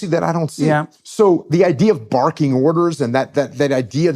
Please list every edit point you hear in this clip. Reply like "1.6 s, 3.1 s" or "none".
0.9 s